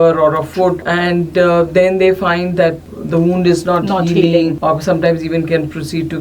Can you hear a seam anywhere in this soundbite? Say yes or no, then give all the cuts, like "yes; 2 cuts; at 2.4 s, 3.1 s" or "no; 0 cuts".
yes; 3 cuts; at 0.9 s, 2.8 s, 4.6 s